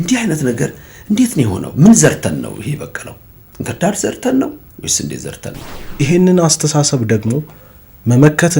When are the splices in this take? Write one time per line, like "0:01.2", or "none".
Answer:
0:05.9